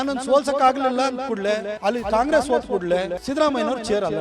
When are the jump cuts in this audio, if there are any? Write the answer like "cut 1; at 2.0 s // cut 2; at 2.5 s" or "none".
cut 1; at 1.7 s // cut 2; at 3.2 s